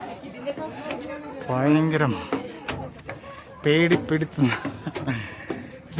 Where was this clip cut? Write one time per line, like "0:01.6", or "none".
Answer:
none